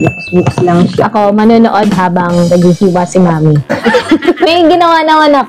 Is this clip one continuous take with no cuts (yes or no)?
yes